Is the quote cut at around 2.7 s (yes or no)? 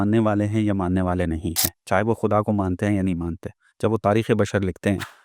no